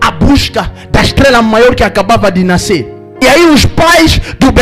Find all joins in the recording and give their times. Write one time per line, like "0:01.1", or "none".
0:03.0

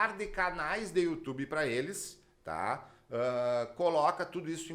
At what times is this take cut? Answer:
none

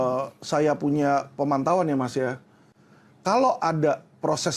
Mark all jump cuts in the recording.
none

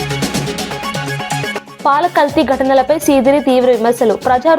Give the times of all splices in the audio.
0:01.1

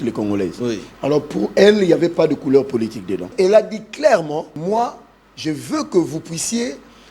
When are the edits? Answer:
0:03.3
0:04.5

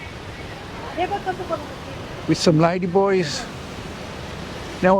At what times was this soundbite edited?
none

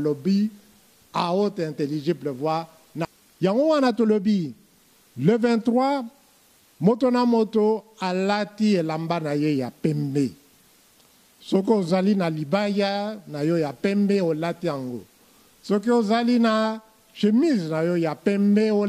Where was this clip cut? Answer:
0:03.1

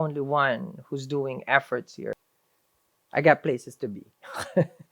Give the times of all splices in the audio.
0:02.2

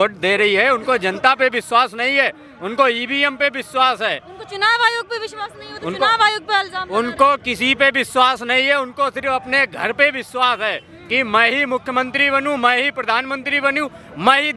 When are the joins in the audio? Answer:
none

